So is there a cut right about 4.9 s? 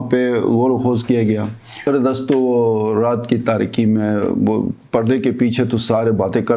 no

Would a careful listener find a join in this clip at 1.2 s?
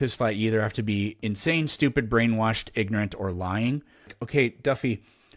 yes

